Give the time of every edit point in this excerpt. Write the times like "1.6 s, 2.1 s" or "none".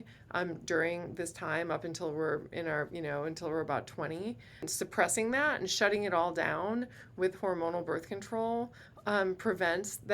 4.7 s

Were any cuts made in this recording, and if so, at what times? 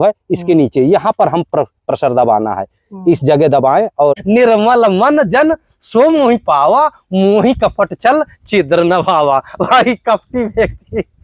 4.2 s

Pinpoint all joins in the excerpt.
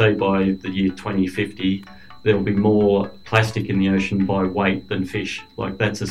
none

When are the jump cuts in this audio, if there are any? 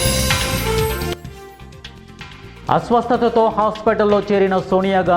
2.6 s

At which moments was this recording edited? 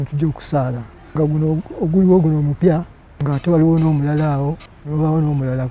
1.2 s, 2.7 s, 4.7 s

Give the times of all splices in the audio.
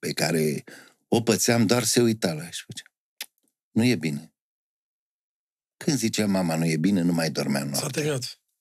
none

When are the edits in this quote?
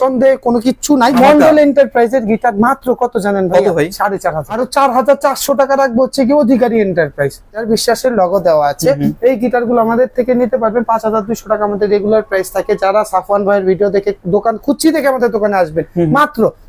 1.1 s, 4.6 s, 7.6 s

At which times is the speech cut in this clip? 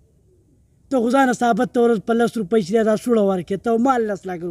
none

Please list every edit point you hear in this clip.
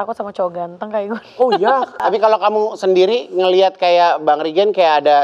2.0 s

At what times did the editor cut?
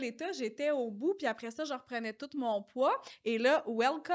none

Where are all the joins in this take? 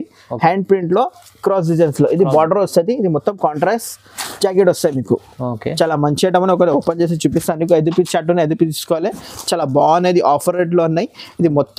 none

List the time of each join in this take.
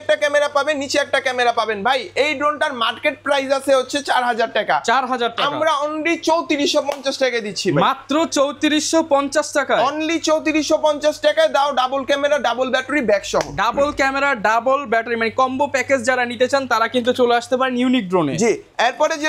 none

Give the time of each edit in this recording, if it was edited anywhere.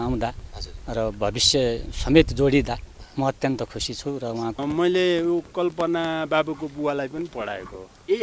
4.6 s

